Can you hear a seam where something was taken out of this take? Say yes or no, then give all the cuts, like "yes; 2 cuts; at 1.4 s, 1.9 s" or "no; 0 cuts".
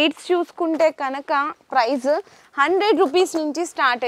no; 0 cuts